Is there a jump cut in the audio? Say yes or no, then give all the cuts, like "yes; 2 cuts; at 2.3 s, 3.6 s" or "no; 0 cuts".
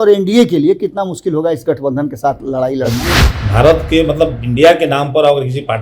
yes; 1 cut; at 3.2 s